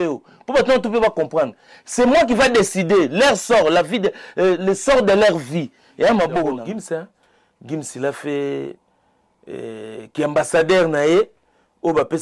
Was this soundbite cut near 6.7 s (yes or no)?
yes